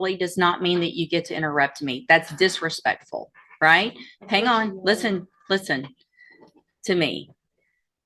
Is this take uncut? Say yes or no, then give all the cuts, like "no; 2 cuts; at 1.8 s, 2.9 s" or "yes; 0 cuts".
yes; 0 cuts